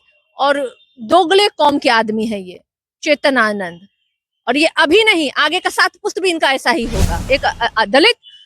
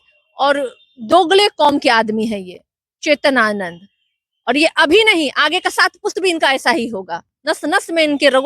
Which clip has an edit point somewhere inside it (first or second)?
first